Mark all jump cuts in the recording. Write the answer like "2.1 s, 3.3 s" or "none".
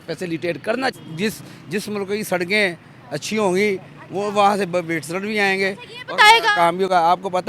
1.0 s